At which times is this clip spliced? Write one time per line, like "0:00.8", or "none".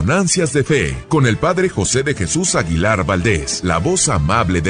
0:01.0
0:03.5